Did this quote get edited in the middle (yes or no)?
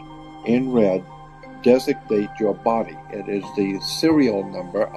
no